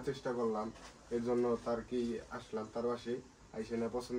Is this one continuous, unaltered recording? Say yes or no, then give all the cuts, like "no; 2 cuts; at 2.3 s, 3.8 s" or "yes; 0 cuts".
yes; 0 cuts